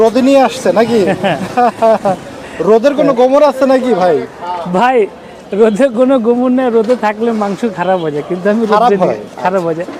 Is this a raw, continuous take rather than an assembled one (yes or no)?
yes